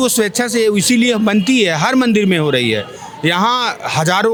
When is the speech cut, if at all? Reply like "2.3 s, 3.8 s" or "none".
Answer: none

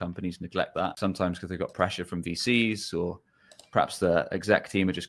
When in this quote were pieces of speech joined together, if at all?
1.0 s

